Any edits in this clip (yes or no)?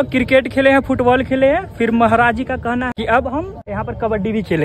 yes